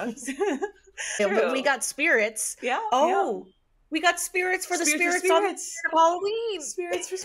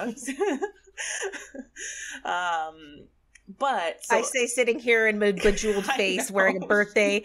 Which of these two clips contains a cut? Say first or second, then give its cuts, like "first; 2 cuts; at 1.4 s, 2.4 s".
first; 1 cut; at 1.2 s